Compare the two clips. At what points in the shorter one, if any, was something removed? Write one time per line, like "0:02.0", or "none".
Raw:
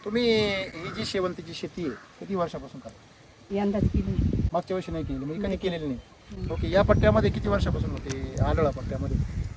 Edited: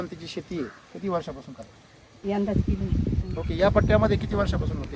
0:03.2